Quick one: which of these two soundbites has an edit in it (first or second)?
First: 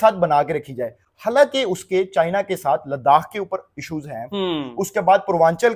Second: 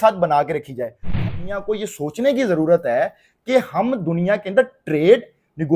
second